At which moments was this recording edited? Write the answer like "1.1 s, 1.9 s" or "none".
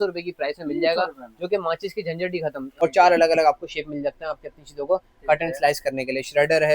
2.8 s